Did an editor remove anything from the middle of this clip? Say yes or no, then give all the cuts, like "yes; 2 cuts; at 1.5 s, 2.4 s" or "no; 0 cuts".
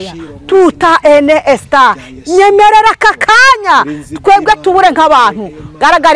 no; 0 cuts